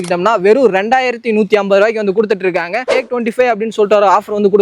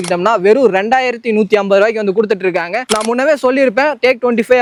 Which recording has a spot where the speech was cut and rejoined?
first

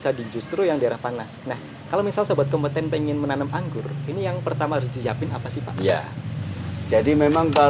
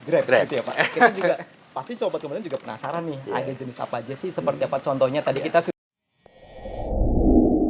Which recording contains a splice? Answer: second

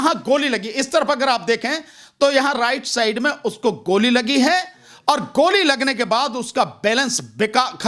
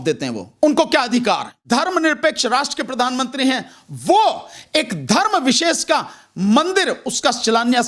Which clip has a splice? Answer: second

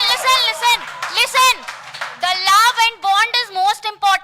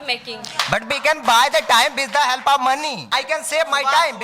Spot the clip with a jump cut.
second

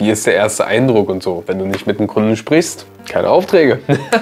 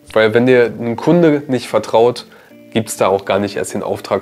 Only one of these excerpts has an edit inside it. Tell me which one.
first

